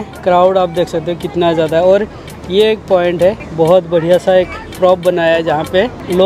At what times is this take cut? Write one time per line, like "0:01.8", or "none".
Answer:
0:03.4